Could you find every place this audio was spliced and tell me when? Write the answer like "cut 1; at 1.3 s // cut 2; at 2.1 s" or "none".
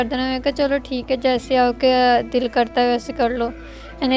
none